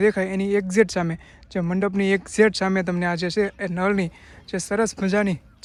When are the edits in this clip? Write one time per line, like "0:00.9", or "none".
none

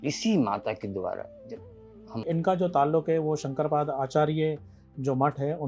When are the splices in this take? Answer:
0:02.2

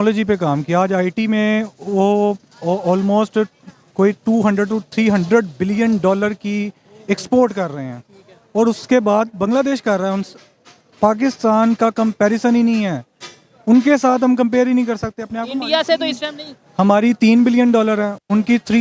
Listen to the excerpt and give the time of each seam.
none

